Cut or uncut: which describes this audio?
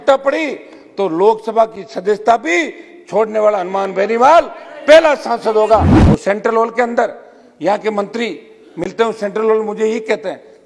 cut